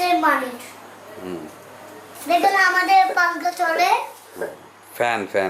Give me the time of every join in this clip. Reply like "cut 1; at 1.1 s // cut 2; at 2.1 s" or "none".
cut 1; at 2.1 s

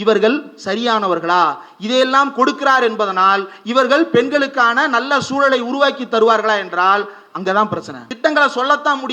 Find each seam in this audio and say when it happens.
cut 1; at 7.9 s

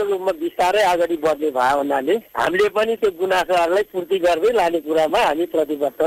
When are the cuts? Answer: none

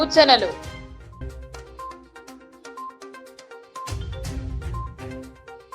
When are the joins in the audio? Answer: cut 1; at 1.3 s

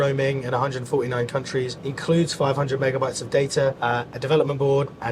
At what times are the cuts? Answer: cut 1; at 1.8 s // cut 2; at 3.8 s

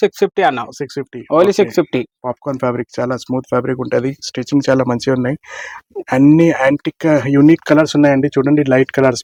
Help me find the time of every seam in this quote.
none

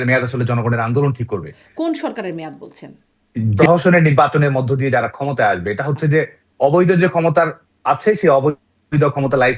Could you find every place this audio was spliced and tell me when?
cut 1; at 1.6 s // cut 2; at 3.5 s

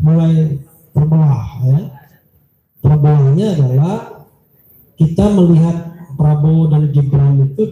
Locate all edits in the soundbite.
none

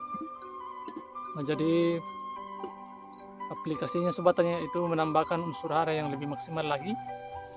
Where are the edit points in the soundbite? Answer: cut 1; at 1.2 s

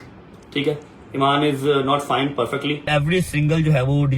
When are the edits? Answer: cut 1; at 2.9 s

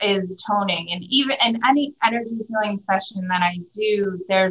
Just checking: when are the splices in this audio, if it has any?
none

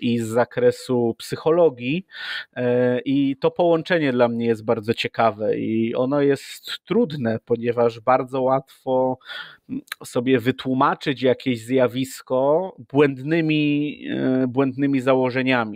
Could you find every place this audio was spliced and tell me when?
none

